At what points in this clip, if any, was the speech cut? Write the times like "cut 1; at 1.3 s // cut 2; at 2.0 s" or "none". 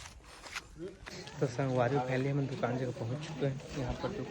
cut 1; at 1.0 s